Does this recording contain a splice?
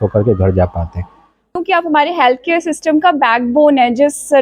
yes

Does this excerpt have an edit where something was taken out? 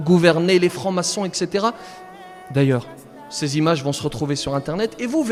no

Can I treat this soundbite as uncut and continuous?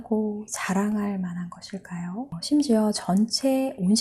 yes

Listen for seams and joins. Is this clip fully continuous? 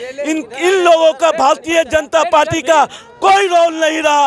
yes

